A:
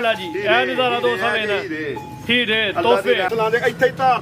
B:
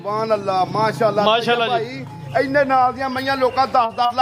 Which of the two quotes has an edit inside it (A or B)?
A